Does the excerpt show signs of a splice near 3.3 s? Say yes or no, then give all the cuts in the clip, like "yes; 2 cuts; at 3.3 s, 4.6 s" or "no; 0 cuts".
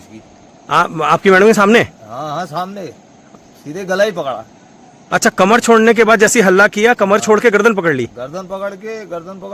yes; 1 cut; at 3.3 s